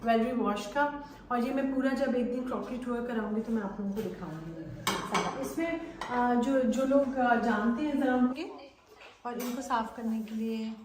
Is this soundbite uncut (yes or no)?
no